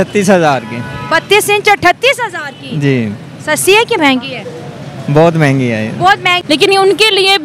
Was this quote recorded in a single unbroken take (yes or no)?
no